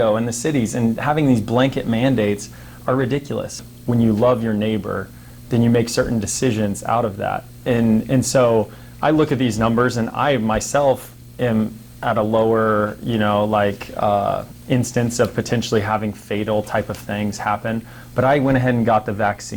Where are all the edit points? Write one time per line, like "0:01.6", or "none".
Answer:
0:03.6